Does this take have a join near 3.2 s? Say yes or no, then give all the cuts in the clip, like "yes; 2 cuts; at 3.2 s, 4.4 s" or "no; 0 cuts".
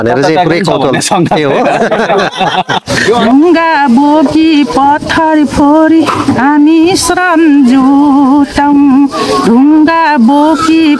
yes; 1 cut; at 3.2 s